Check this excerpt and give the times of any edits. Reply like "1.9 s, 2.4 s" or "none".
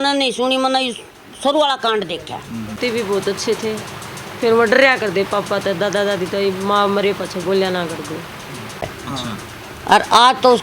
2.8 s, 8.8 s